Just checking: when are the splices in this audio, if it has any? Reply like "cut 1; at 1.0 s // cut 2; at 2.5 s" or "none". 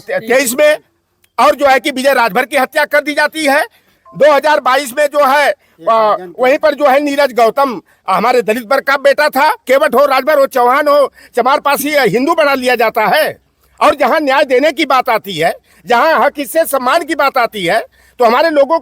cut 1; at 9.6 s